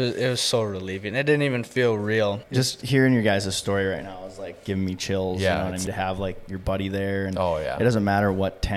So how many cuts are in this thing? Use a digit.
2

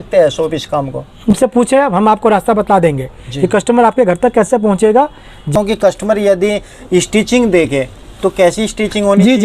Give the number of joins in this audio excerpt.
2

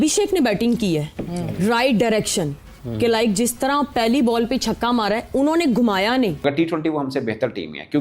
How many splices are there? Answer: 1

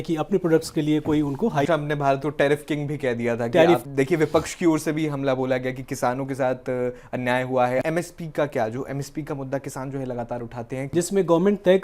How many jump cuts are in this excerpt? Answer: 4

